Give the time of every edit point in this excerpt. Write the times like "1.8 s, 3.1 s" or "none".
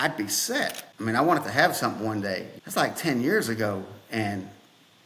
0.9 s, 2.5 s